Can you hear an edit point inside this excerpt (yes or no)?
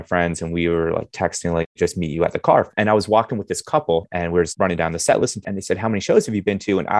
yes